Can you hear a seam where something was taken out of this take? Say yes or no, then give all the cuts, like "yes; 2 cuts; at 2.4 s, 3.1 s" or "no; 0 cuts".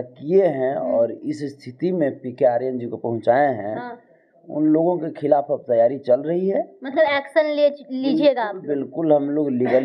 no; 0 cuts